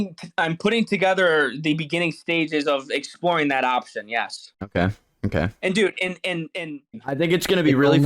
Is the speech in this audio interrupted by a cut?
yes; 1 cut; at 6.9 s

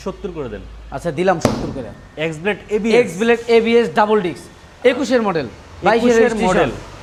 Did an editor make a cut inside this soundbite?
no; 0 cuts

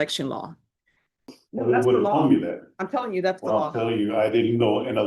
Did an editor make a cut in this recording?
yes; 1 cut; at 1.3 s

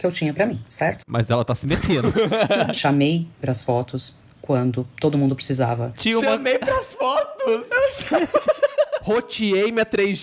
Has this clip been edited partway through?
yes; 2 cuts; at 2.7 s, 9.0 s

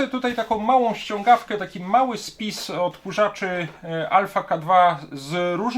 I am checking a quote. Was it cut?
no; 0 cuts

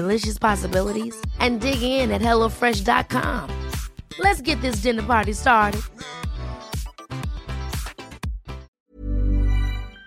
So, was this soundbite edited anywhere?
yes; 1 cut; at 8.7 s

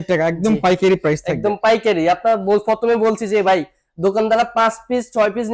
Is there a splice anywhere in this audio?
no; 0 cuts

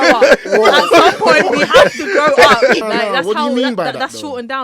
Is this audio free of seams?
no; 1 cut; at 2.8 s

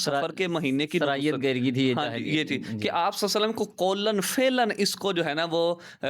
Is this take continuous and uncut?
yes; 0 cuts

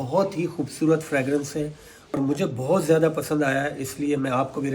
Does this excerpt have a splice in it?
yes; 1 cut; at 2.2 s

